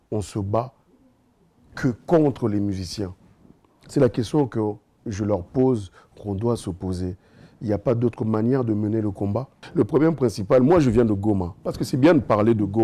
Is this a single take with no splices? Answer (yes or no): no